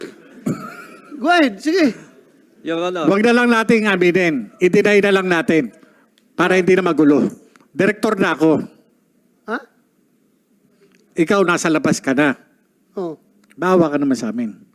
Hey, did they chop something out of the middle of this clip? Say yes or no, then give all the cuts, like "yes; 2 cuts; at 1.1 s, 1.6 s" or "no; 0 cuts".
no; 0 cuts